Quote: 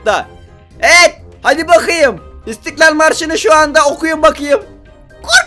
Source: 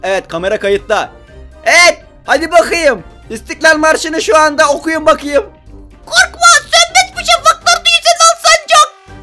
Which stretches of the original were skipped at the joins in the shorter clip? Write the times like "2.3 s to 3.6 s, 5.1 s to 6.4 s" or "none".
none